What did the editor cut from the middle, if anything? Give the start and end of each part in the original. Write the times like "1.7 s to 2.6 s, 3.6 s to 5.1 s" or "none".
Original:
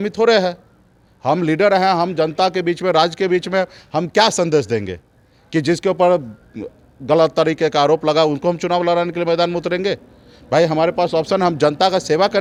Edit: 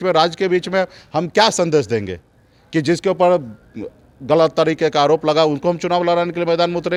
none